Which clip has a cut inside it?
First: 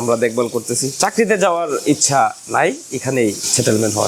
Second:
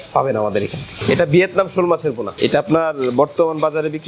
second; 2 cuts; at 0.9 s, 2.3 s

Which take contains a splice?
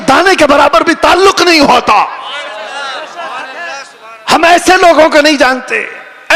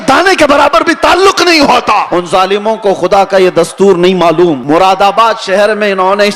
second; 2 cuts; at 2.1 s, 4.6 s

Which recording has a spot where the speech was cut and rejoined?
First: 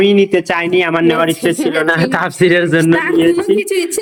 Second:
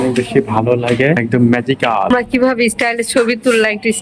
second; 2 cuts; at 1.2 s, 2.1 s

